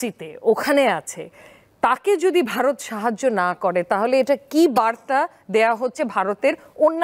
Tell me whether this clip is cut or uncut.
uncut